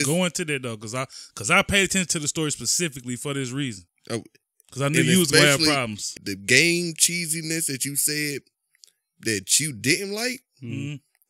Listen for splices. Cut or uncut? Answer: cut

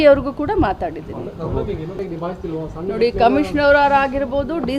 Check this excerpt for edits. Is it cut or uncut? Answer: cut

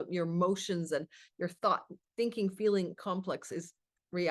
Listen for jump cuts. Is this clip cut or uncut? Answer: uncut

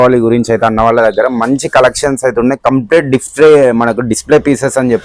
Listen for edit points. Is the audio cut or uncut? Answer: uncut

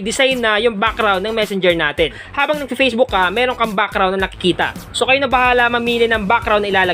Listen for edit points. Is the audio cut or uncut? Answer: cut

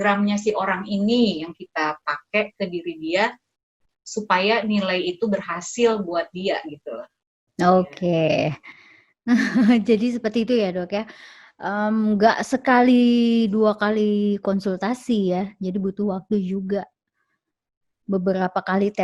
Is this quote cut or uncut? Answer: uncut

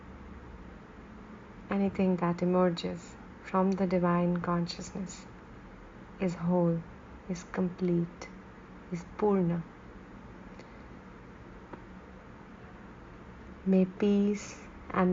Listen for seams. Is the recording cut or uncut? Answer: uncut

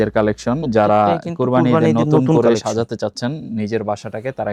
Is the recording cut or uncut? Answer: uncut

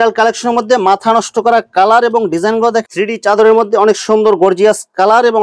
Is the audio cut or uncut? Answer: cut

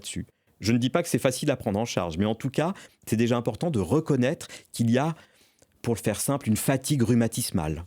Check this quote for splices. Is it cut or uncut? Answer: uncut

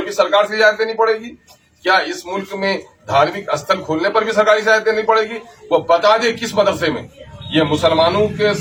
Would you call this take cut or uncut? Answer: uncut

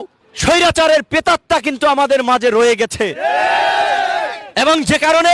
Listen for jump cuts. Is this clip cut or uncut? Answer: uncut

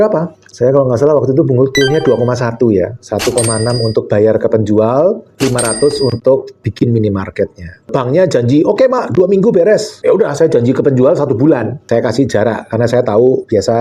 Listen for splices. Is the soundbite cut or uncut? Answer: uncut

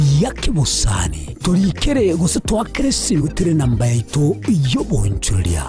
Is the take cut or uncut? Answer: cut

